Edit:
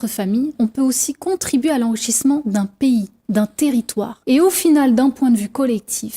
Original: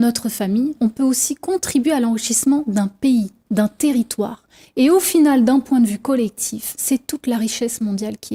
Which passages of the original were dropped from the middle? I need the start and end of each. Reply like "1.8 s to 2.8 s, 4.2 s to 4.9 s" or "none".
4.4 s to 4.6 s